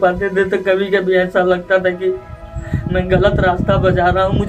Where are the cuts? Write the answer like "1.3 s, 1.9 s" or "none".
none